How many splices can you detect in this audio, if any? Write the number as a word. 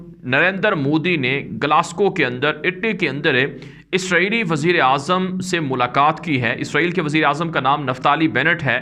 zero